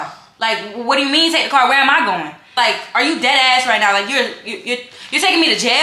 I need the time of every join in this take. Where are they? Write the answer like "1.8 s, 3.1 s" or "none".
2.5 s

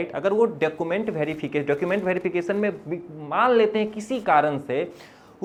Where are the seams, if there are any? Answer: none

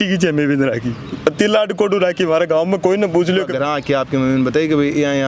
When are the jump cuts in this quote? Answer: 3.5 s

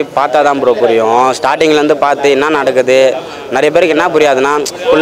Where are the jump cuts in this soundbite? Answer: none

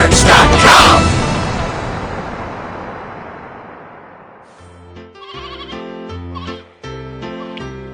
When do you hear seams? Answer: 4.8 s

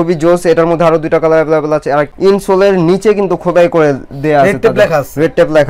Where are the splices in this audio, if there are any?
2.1 s

